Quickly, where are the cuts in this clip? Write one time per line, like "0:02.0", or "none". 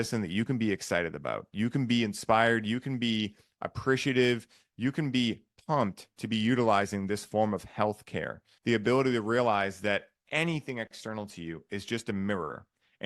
0:08.6